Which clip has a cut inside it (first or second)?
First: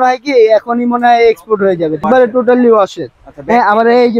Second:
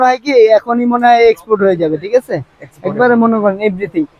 first